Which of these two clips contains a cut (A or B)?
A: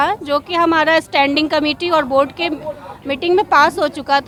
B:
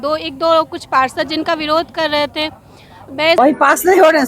B